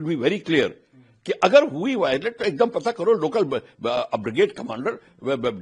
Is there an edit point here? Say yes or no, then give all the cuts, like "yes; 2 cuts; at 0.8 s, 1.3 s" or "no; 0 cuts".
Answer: no; 0 cuts